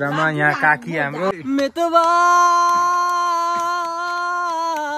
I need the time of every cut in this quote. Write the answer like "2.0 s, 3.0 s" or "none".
1.3 s